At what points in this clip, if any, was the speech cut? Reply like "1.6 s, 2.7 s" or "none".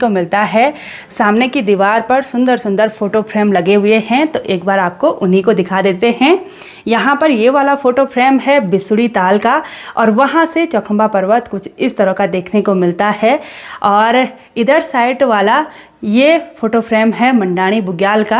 none